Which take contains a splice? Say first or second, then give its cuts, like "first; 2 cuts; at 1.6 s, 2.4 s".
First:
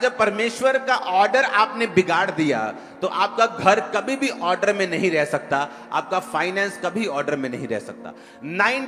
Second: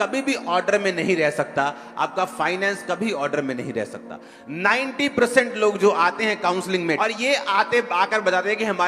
second; 1 cut; at 7.0 s